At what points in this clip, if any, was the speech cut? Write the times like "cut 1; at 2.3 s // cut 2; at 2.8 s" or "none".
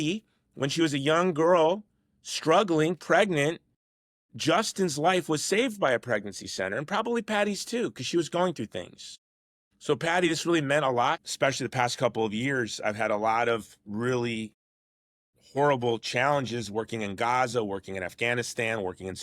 cut 1; at 11.2 s